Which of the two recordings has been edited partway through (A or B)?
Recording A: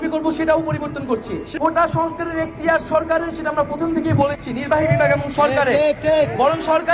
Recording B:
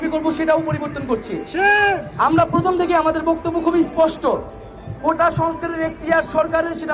A